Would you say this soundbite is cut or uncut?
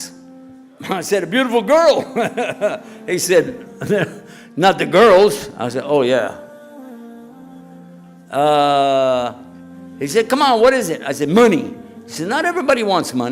cut